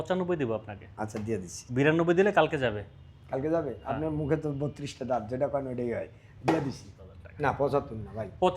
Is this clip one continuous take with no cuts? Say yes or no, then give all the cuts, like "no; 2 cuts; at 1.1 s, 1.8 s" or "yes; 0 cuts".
no; 1 cut; at 7.0 s